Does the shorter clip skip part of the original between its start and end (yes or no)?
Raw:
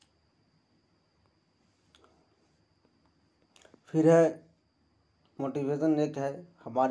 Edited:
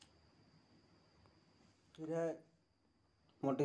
yes